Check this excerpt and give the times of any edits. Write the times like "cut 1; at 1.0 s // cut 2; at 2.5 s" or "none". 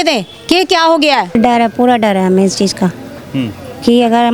cut 1; at 1.3 s